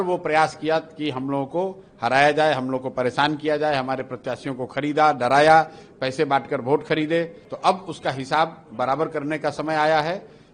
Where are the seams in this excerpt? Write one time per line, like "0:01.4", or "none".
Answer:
0:07.4